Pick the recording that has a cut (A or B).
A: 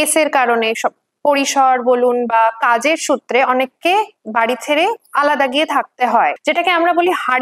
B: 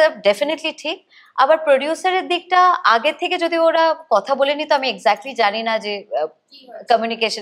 A